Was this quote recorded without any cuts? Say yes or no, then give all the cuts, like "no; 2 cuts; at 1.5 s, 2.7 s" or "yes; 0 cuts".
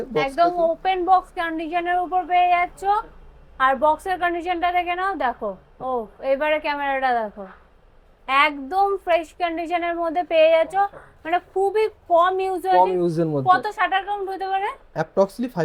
yes; 0 cuts